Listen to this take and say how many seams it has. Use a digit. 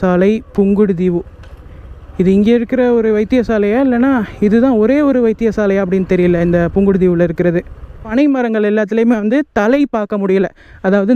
1